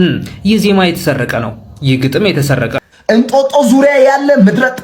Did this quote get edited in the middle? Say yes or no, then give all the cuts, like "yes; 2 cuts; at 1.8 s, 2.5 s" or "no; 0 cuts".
yes; 1 cut; at 2.9 s